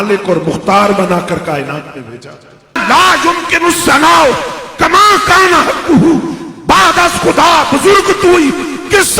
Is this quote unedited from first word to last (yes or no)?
no